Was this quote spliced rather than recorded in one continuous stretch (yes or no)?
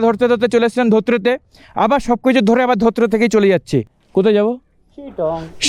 yes